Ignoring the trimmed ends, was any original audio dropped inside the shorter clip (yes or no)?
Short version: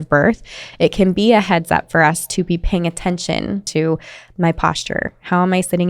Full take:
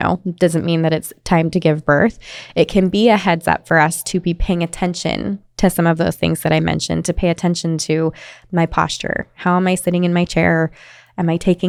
yes